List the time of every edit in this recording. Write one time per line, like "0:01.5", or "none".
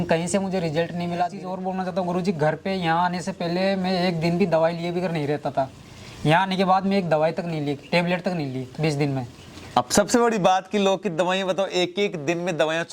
0:01.4